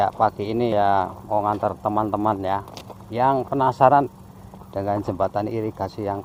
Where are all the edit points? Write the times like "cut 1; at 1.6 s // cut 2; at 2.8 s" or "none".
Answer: none